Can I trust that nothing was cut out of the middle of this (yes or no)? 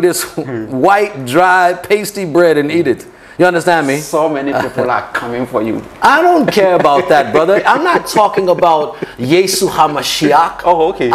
yes